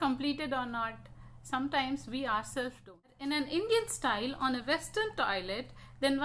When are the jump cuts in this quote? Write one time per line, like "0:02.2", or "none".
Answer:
0:03.1